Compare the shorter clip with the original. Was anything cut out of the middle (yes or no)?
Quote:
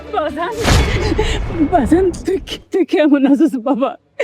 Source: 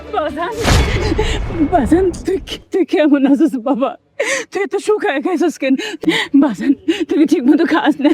no